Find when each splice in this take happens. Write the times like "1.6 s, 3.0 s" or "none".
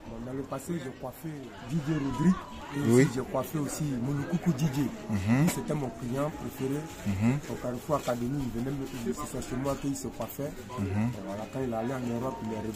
1.5 s